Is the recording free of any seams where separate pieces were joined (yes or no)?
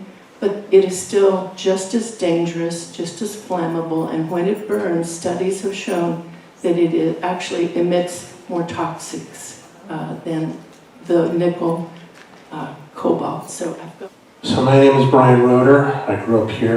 no